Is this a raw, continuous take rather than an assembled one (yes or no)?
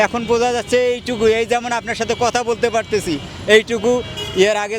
yes